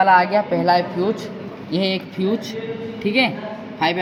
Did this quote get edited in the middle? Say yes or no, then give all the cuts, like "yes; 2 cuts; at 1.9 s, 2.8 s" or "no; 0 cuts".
no; 0 cuts